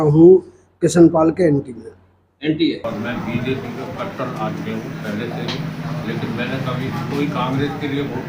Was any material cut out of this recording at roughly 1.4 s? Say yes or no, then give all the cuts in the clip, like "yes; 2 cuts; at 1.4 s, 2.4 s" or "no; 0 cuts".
no; 1 cut; at 2.8 s